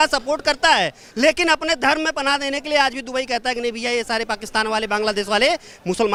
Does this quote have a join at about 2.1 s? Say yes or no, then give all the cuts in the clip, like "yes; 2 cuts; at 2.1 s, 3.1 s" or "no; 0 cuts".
no; 0 cuts